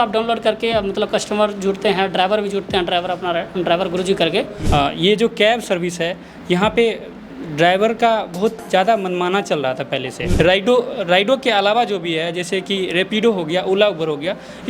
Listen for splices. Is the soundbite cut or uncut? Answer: cut